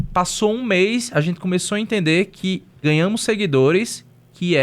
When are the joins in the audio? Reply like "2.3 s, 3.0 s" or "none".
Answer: 2.7 s

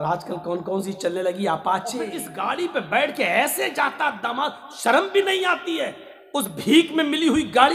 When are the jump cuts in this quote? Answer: 2.3 s

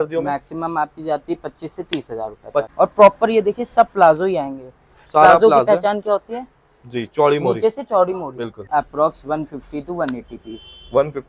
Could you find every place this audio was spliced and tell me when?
2.7 s, 8.7 s

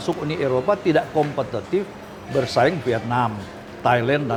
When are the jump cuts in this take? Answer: none

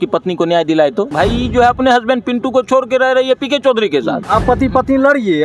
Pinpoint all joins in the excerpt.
1.1 s, 4.2 s

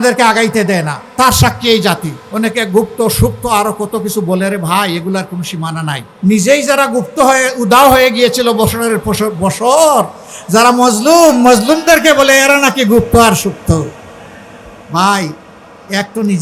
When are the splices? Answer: 2.2 s, 6.1 s

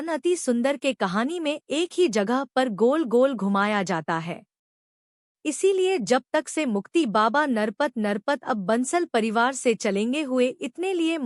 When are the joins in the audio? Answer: 5.2 s

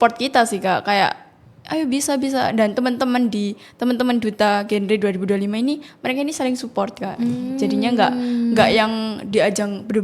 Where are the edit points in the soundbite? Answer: none

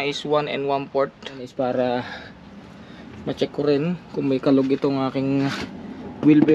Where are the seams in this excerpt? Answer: 1.5 s

